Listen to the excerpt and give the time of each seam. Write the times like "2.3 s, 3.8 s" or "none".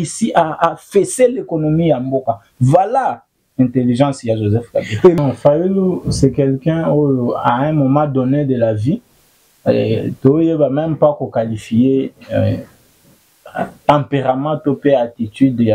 5.2 s